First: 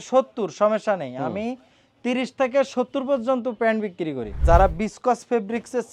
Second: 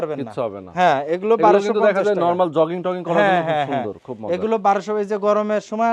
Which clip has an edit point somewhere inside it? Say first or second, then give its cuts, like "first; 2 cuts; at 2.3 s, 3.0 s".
first; 1 cut; at 4.4 s